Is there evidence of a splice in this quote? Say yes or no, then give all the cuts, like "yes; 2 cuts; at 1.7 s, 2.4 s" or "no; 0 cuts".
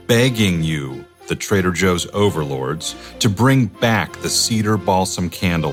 no; 0 cuts